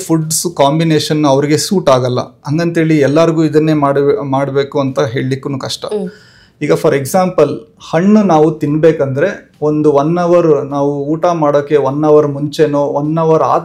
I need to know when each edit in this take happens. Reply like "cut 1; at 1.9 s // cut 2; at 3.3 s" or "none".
none